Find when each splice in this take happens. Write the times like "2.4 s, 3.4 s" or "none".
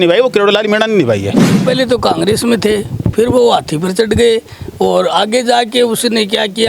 1.6 s